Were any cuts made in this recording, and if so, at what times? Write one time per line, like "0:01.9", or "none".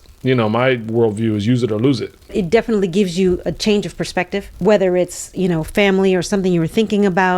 0:02.3
0:04.5